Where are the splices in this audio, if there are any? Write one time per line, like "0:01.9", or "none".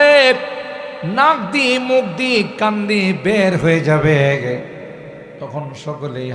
0:05.3